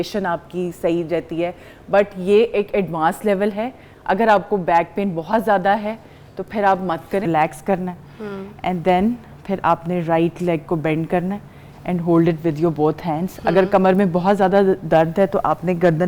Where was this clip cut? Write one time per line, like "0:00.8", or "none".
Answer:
0:07.3

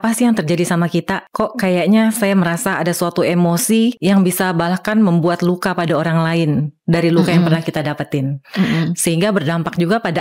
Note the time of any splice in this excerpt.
0:01.2
0:04.0

